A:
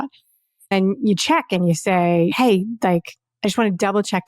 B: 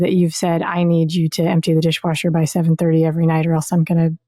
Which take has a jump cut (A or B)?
A